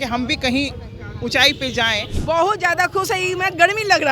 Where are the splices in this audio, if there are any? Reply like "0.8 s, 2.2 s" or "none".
2.1 s